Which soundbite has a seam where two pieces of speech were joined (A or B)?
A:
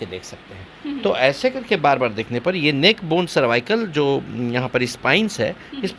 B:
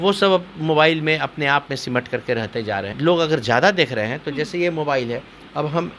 B